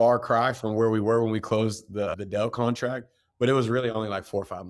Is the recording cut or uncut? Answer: cut